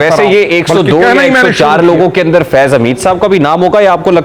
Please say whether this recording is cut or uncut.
uncut